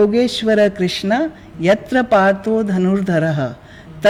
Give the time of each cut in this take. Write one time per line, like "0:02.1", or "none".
none